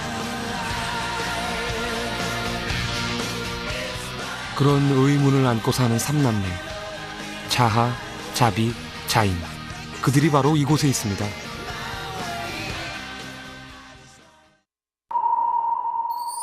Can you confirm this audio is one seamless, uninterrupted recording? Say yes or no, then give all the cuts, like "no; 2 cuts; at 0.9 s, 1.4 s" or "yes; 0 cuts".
no; 1 cut; at 2.4 s